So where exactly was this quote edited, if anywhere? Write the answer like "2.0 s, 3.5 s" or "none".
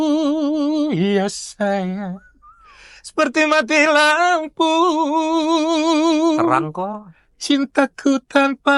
none